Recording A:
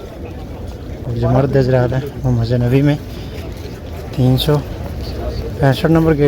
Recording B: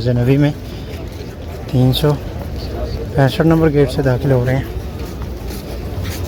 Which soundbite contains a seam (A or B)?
A